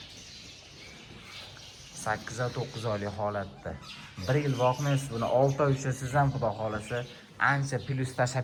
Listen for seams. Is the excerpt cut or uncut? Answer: uncut